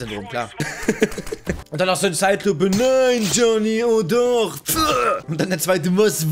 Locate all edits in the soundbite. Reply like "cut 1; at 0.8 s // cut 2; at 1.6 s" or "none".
cut 1; at 1.6 s